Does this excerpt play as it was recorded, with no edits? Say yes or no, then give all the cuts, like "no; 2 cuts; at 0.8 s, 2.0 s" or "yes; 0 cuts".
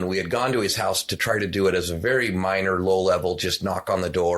yes; 0 cuts